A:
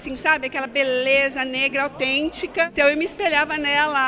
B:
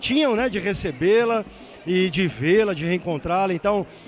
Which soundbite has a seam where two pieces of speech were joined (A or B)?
A